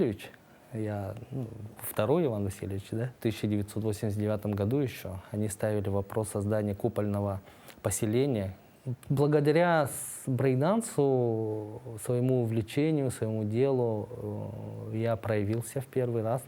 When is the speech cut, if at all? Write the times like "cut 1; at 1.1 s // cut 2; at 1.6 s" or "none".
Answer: cut 1; at 3.1 s // cut 2; at 8.9 s

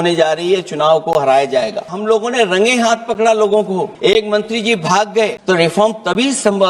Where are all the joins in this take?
cut 1; at 1.9 s // cut 2; at 3.9 s // cut 3; at 5.4 s

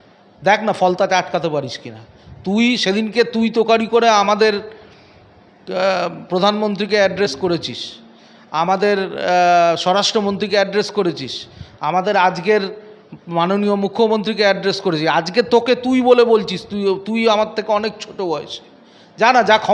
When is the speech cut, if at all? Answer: none

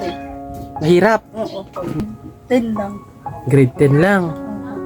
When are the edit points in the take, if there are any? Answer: cut 1; at 2.0 s

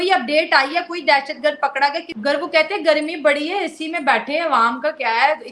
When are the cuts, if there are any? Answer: cut 1; at 2.1 s

